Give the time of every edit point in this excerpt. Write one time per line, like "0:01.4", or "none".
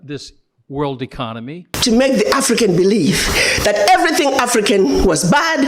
0:01.7